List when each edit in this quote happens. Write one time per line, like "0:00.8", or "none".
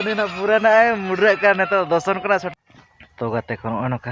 0:02.5